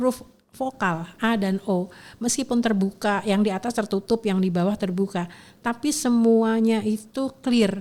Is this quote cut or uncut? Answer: uncut